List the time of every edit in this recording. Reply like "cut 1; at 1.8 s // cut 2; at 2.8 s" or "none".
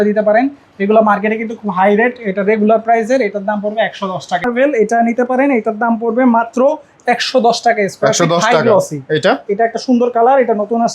cut 1; at 4.5 s